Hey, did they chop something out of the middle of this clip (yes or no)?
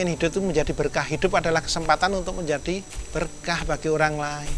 yes